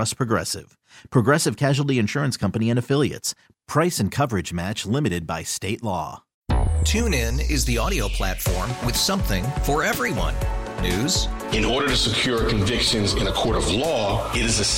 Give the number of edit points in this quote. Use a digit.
1